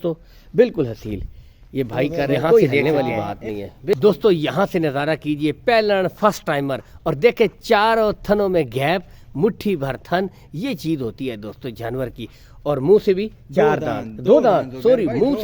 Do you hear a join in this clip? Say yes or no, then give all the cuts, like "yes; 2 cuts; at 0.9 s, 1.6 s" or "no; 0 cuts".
yes; 1 cut; at 3.9 s